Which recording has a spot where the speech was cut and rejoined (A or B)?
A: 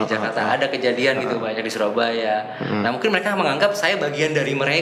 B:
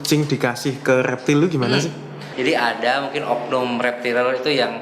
B